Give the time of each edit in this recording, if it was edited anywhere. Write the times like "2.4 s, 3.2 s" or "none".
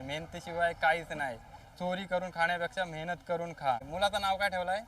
3.9 s